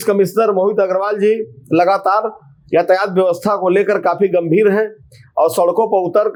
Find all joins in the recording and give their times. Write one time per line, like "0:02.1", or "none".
none